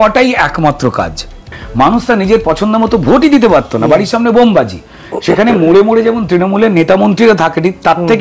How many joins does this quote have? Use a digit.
1